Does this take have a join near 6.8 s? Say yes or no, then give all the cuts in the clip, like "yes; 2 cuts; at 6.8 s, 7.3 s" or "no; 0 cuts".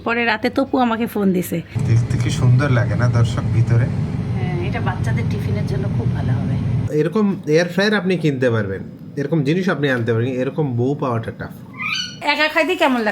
yes; 3 cuts; at 1.8 s, 6.8 s, 12.2 s